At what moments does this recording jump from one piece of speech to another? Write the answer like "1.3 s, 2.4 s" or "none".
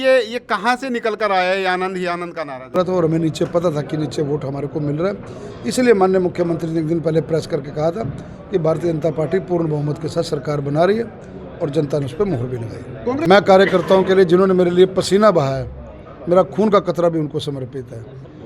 2.7 s, 13.2 s